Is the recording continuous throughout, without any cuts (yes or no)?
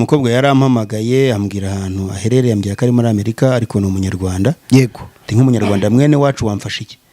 no